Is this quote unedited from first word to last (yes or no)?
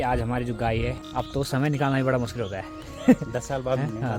no